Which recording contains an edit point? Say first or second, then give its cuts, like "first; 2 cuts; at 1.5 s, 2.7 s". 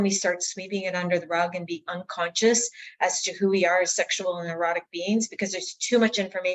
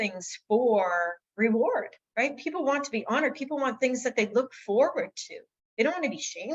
second; 2 cuts; at 1.2 s, 2.0 s